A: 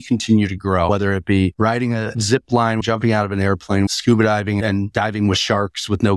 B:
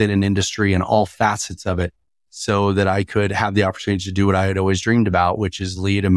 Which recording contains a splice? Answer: A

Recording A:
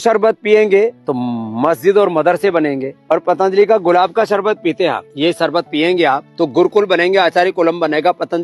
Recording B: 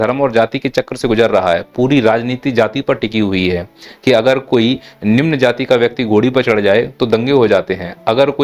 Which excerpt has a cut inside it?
A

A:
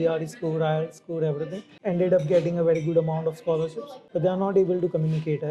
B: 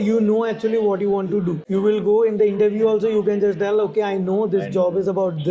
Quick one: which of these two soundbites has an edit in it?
B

